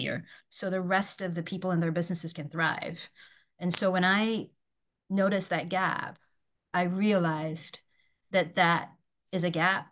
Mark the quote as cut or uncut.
uncut